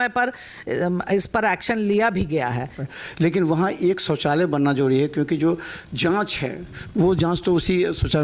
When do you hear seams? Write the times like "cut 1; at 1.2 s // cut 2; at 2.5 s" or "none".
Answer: cut 1; at 2.8 s